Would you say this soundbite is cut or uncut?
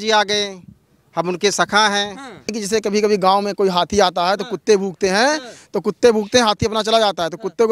cut